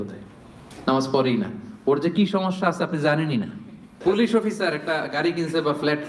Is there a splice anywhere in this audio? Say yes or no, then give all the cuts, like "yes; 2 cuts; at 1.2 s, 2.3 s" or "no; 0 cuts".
yes; 1 cut; at 4.0 s